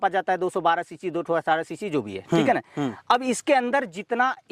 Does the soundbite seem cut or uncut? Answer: uncut